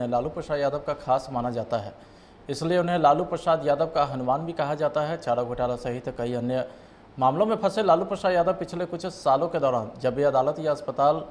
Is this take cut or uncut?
uncut